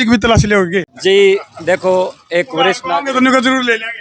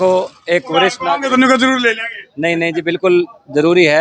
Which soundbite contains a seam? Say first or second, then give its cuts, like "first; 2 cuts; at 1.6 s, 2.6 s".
first; 1 cut; at 0.9 s